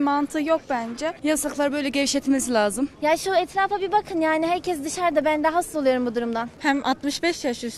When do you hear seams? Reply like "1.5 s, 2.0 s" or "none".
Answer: 1.1 s, 2.9 s, 6.5 s